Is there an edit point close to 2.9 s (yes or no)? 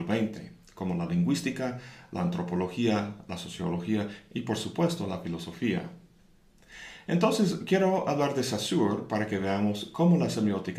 yes